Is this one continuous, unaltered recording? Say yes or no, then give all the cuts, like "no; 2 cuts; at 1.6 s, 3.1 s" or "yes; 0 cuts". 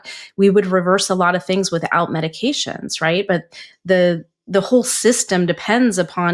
yes; 0 cuts